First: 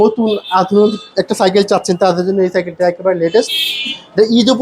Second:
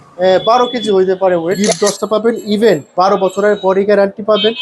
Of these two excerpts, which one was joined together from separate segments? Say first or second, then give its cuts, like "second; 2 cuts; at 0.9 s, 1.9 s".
second; 1 cut; at 1.6 s